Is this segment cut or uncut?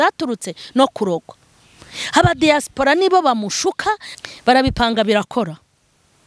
cut